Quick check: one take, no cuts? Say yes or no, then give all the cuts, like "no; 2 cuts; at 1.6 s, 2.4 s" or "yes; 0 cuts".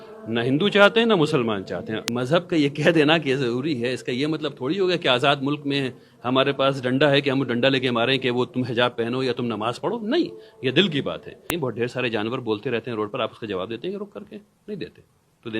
no; 2 cuts; at 2.0 s, 11.4 s